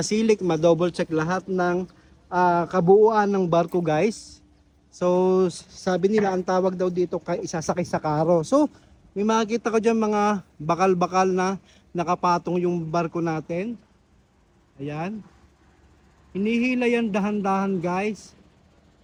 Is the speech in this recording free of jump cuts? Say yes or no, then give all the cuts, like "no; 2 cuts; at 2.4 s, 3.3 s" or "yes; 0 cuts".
yes; 0 cuts